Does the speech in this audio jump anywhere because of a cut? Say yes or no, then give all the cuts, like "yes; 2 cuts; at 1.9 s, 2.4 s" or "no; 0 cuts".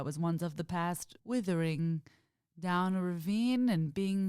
yes; 1 cut; at 1.1 s